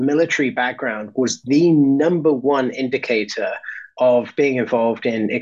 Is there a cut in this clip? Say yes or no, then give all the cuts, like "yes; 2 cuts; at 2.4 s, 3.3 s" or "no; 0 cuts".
no; 0 cuts